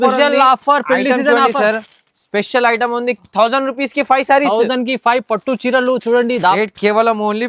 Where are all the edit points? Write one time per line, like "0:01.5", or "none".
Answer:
0:06.6